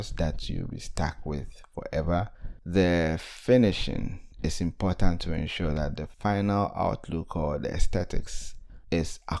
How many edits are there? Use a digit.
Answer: 0